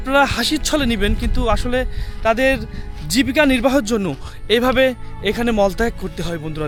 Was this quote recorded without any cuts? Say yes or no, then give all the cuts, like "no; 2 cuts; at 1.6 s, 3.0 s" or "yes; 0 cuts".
yes; 0 cuts